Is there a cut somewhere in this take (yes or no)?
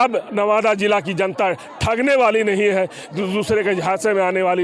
no